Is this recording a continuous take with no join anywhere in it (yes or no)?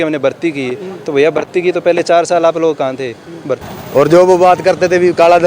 no